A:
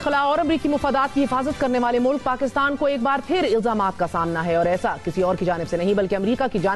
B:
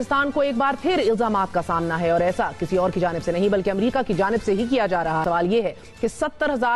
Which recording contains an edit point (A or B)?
B